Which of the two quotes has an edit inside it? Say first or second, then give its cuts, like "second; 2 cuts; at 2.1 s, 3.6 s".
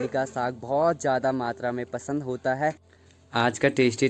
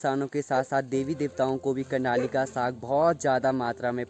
first; 1 cut; at 2.9 s